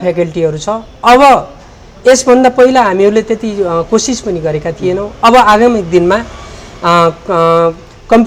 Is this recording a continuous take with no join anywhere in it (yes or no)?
yes